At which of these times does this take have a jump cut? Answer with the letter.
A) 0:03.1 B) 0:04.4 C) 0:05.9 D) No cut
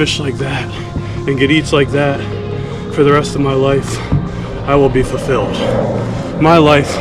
D